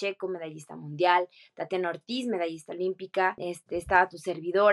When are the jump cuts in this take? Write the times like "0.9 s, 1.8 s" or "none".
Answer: 3.4 s